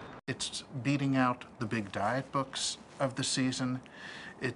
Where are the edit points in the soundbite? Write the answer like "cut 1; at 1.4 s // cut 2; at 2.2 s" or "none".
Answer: cut 1; at 2.0 s